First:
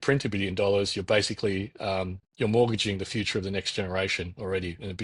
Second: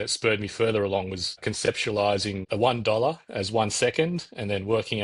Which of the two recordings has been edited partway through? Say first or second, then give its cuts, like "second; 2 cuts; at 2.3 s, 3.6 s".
second; 2 cuts; at 1.4 s, 2.4 s